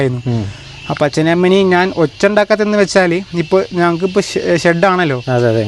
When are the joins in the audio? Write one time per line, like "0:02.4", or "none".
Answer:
none